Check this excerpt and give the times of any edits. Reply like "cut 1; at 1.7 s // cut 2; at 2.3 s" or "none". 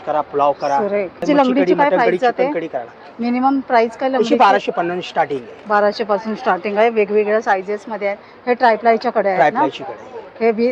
cut 1; at 1.2 s